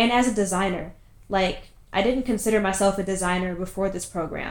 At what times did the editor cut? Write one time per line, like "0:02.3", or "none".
none